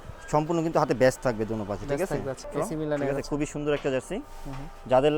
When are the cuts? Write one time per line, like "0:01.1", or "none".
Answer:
0:02.5